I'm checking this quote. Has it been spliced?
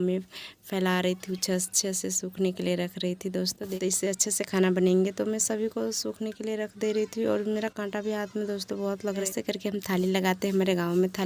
yes; 2 cuts; at 3.6 s, 9.3 s

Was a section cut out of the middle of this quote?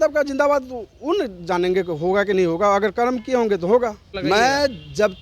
yes; 1 cut; at 4.1 s

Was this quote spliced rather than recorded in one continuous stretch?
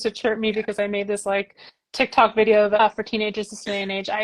yes; 1 cut; at 2.8 s

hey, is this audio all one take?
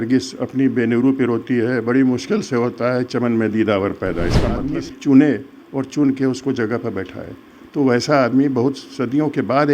no; 1 cut; at 4.5 s

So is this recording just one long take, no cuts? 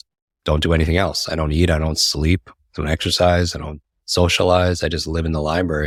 yes; 0 cuts

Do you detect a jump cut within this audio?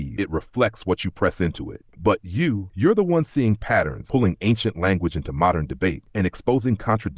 no; 0 cuts

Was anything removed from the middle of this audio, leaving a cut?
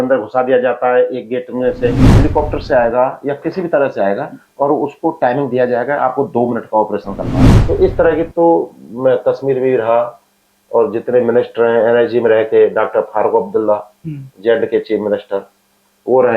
yes; 2 cuts; at 2.0 s, 7.5 s

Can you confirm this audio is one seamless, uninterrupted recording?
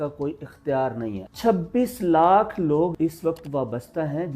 no; 1 cut; at 1.2 s

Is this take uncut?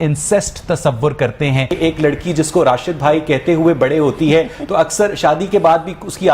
no; 1 cut; at 1.7 s

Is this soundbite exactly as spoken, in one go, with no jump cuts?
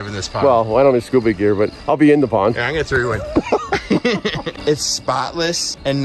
no; 1 cut; at 4.5 s

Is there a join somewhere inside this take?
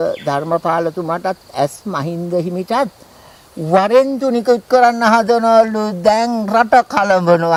no; 0 cuts

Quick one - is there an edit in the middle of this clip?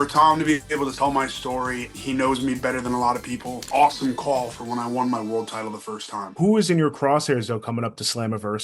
yes; 4 cuts; at 0.9 s, 1.9 s, 3.6 s, 6.3 s

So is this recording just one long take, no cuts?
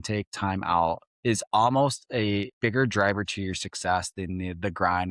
no; 2 cuts; at 1.1 s, 2.5 s

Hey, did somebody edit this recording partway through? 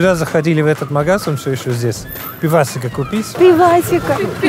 yes; 1 cut; at 3.3 s

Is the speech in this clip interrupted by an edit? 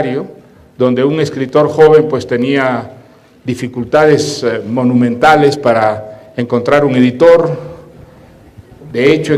no; 0 cuts

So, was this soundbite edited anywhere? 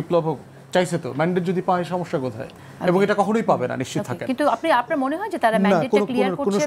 no; 0 cuts

